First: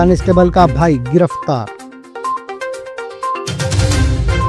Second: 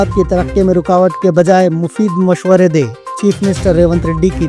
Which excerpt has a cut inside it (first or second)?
first